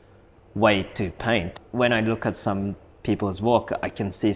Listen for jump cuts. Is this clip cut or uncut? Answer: cut